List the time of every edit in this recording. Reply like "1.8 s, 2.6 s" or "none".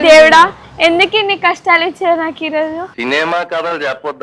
none